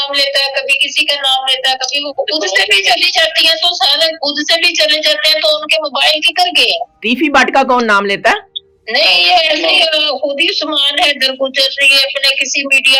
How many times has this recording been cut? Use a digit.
0